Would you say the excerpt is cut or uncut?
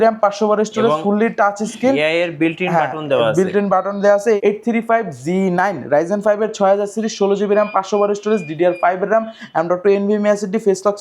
cut